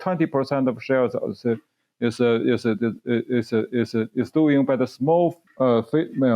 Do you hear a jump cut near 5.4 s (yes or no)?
yes